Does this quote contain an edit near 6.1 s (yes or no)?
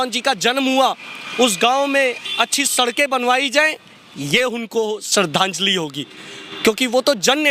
no